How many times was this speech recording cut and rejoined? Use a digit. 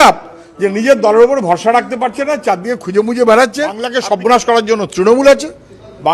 1